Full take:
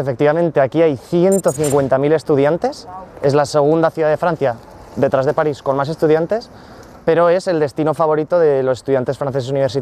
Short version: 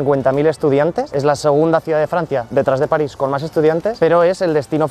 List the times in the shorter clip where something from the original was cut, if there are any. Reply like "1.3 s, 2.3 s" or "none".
1.1 s, 2.5 s, 3.9 s

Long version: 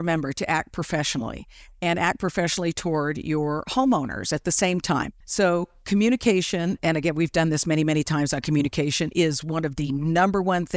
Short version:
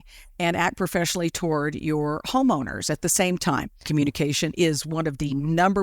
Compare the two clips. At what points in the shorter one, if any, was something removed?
3.8 s

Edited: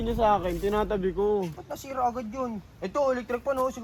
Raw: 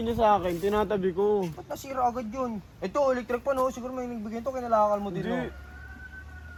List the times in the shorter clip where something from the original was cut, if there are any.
none

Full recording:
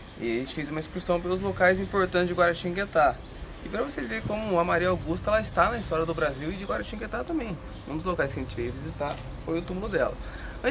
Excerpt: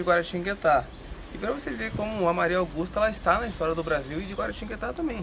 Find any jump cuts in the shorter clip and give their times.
none

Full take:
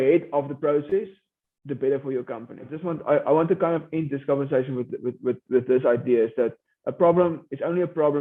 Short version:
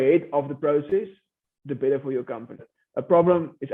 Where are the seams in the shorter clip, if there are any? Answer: 2.8 s

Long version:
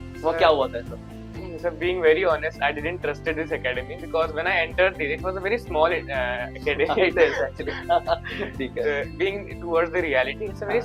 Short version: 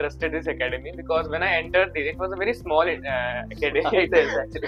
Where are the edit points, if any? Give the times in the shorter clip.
none

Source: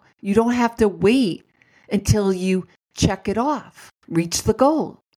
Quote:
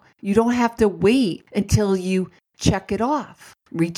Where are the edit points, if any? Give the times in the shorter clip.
1.4 s

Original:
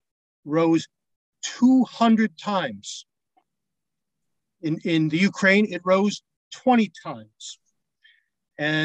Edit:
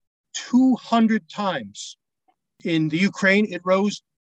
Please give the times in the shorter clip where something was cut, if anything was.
2.6 s

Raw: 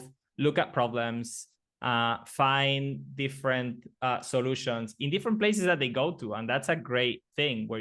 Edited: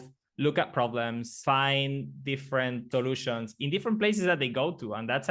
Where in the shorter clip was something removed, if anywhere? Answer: 1.3 s, 2.8 s

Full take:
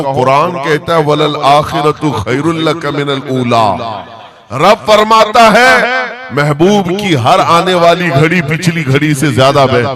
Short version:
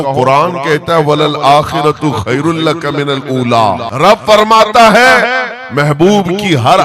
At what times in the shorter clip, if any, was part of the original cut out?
3.9 s

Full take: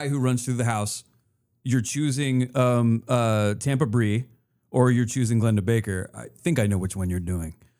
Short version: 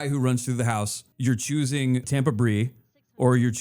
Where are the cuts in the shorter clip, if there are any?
1.0 s, 2.0 s

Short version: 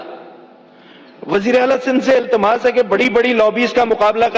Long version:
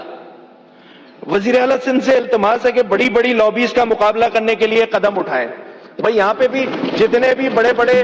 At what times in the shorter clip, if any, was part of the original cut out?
none

